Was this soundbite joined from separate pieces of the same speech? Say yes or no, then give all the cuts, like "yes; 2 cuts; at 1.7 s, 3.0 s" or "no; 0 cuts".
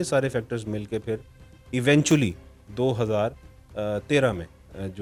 no; 0 cuts